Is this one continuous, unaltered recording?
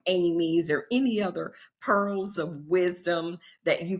yes; 0 cuts

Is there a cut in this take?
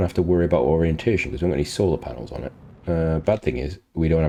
no; 0 cuts

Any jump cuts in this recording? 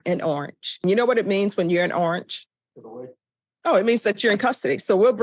no; 0 cuts

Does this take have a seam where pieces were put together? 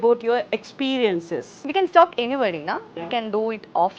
yes; 1 cut; at 1.6 s

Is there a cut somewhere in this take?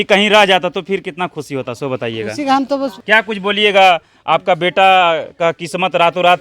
yes; 1 cut; at 3.0 s

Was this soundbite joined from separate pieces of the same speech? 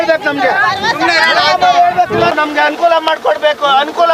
yes; 1 cut; at 2.3 s

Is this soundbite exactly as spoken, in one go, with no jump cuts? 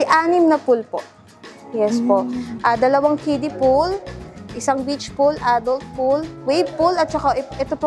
yes; 0 cuts

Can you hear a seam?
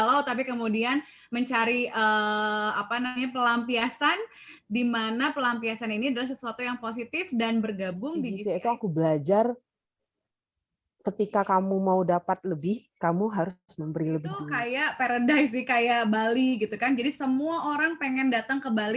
yes; 2 cuts; at 8.4 s, 14.5 s

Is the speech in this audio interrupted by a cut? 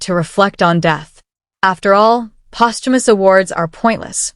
yes; 1 cut; at 3.0 s

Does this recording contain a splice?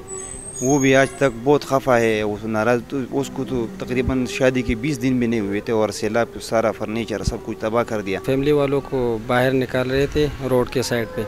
yes; 1 cut; at 8.2 s

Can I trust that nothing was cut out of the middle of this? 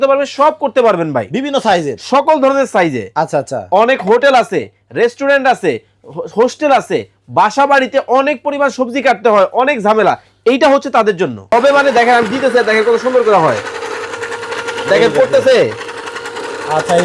no; 1 cut; at 11.5 s

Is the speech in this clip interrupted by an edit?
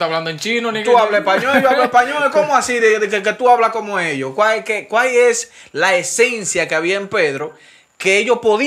no; 0 cuts

